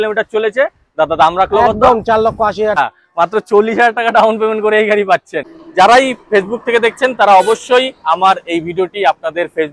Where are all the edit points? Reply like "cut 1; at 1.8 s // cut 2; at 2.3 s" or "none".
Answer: cut 1; at 2.8 s // cut 2; at 5.6 s